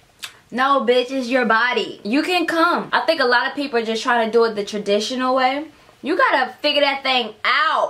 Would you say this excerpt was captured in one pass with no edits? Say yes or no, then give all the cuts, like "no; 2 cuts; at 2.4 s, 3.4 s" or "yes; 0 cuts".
no; 2 cuts; at 2.0 s, 2.9 s